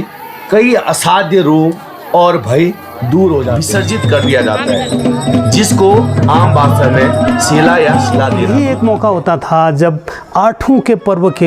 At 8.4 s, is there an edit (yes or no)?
yes